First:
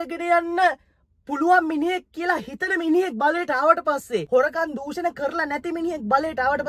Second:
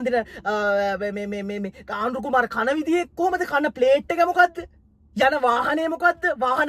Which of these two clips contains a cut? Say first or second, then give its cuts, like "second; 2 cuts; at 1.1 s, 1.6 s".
first; 1 cut; at 4.2 s